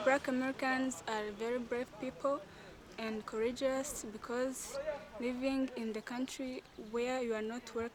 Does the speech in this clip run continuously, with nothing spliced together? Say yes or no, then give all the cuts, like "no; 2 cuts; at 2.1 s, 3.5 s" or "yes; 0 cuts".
yes; 0 cuts